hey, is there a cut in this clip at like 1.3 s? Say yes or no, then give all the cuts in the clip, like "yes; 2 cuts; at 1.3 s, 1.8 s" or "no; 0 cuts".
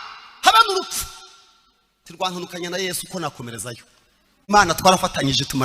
no; 1 cut; at 4.5 s